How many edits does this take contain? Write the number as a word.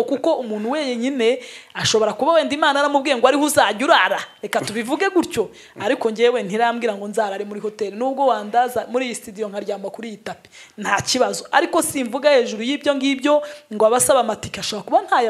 zero